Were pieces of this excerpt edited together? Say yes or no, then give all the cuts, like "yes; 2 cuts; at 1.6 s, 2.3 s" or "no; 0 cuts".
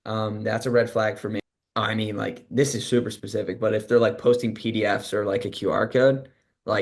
yes; 1 cut; at 1.4 s